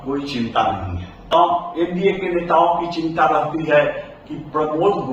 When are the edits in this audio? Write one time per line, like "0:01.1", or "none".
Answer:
0:01.3

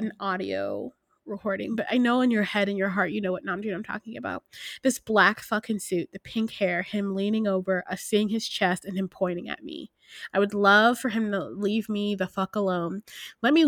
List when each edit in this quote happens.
none

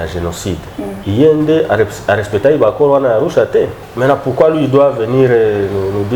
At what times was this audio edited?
0:01.0
0:03.8

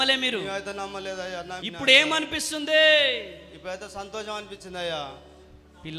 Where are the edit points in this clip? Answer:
0:01.6

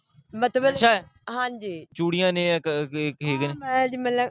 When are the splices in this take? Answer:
0:01.9

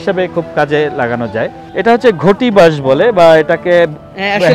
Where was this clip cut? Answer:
0:01.6

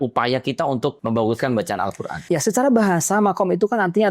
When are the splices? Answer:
0:01.0
0:02.1

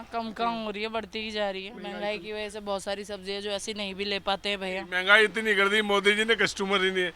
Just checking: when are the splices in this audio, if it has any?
0:01.7
0:04.9

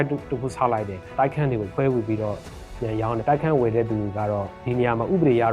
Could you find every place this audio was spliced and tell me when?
0:01.7
0:03.2

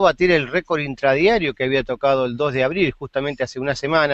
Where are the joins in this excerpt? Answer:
none

